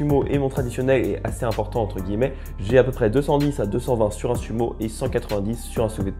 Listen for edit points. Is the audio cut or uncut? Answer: uncut